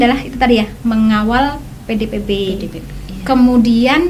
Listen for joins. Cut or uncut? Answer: uncut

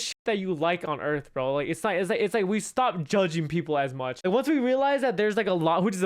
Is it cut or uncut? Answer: cut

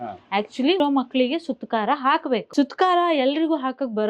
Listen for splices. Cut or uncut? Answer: cut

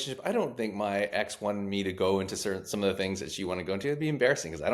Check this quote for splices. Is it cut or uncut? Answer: uncut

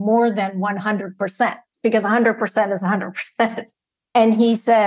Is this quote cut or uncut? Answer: cut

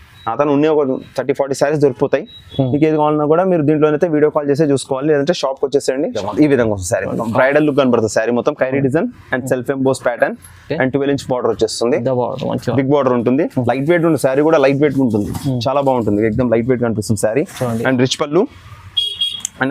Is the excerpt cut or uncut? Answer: cut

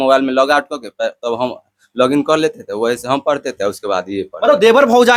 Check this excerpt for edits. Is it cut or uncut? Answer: uncut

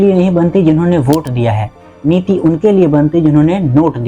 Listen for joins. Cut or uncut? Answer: uncut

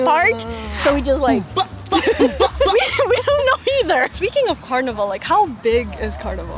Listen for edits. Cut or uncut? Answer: uncut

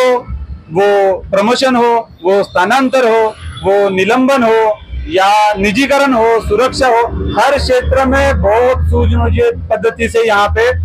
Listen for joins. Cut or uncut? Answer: uncut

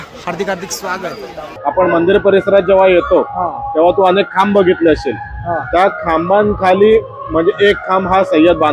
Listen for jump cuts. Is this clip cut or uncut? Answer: cut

